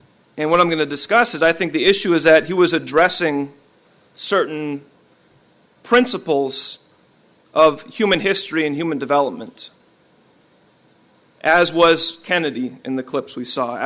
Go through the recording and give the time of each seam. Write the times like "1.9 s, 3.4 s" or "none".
12.7 s